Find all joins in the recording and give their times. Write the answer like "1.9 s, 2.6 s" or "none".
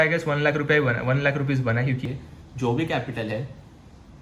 2.0 s

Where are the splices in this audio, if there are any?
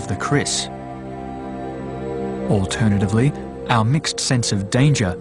2.4 s

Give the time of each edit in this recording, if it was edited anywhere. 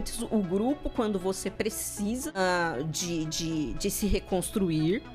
2.4 s

